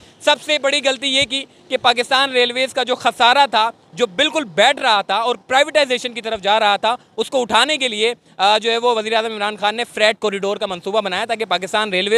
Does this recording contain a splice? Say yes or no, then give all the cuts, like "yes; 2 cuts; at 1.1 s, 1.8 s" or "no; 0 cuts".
no; 0 cuts